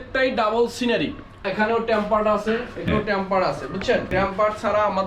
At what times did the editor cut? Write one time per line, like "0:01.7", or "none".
0:01.4
0:02.9
0:04.1